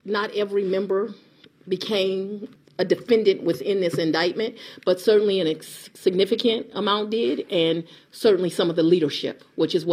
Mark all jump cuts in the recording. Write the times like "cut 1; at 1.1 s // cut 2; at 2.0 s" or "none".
cut 1; at 2.5 s